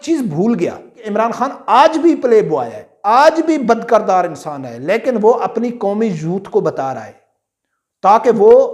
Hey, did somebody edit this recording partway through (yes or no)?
yes